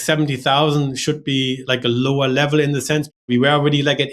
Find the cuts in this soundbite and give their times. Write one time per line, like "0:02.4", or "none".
0:01.6
0:03.2